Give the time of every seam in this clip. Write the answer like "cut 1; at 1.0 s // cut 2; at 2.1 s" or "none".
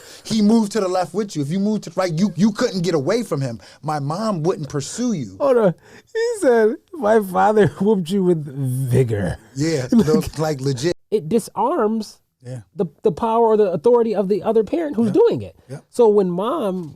cut 1; at 11.0 s

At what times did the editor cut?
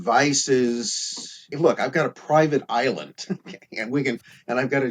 cut 1; at 1.4 s

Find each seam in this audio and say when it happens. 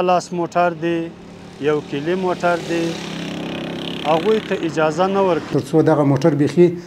cut 1; at 5.5 s

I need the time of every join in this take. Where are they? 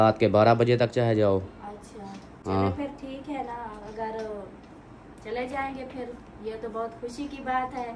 none

